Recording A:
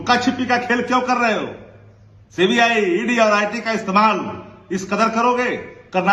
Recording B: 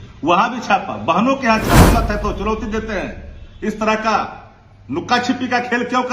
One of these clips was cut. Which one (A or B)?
B